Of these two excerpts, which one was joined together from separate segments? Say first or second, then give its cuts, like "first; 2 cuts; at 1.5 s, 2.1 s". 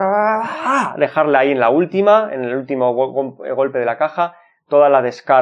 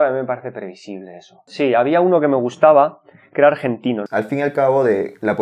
second; 2 cuts; at 1.4 s, 4.0 s